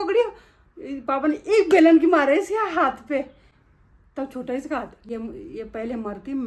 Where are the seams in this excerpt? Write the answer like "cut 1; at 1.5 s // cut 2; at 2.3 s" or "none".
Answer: cut 1; at 5.1 s